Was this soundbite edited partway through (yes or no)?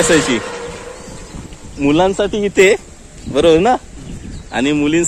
no